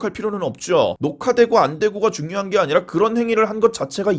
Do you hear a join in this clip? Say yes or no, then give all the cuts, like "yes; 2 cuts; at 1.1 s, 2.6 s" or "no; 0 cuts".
yes; 1 cut; at 1.0 s